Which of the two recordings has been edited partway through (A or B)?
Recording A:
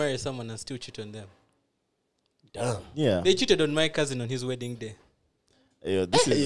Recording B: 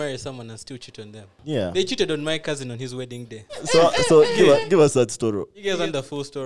B